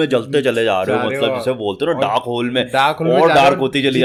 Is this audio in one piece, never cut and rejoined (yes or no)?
yes